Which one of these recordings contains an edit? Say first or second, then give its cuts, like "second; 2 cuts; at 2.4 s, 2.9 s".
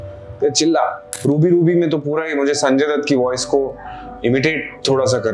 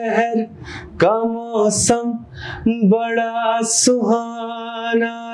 first; 1 cut; at 1.1 s